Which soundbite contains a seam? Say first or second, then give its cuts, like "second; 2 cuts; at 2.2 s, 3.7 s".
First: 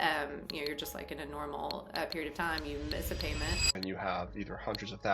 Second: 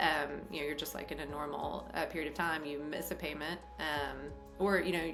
first; 1 cut; at 3.7 s